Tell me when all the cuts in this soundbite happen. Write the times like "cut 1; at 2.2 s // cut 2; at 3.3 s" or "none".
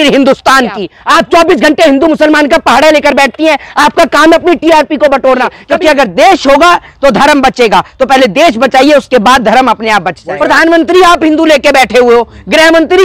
cut 1; at 0.9 s // cut 2; at 5.6 s // cut 3; at 10.2 s